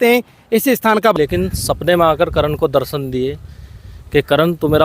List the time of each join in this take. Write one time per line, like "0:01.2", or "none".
0:01.1